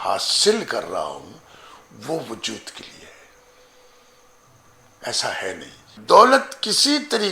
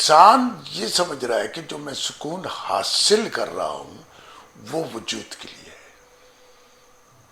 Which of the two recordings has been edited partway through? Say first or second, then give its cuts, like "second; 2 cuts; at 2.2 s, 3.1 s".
first; 1 cut; at 5.9 s